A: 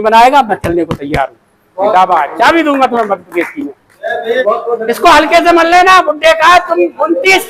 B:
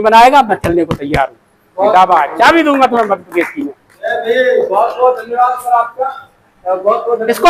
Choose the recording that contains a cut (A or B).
A